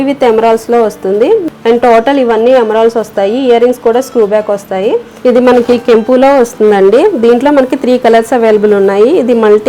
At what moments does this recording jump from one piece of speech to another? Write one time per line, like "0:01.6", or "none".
0:01.4
0:05.1